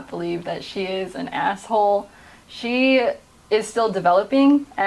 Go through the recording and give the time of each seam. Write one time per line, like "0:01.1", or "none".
none